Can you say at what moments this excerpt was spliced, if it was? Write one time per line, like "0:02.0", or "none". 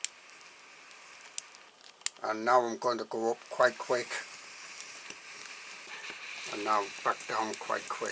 0:06.0

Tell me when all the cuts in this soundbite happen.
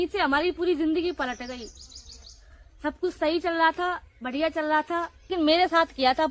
0:05.3

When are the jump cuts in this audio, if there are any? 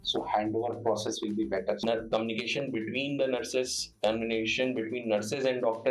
0:01.8

